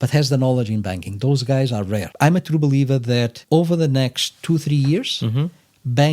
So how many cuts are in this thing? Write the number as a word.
two